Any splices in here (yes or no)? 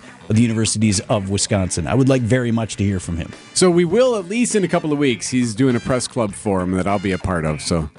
no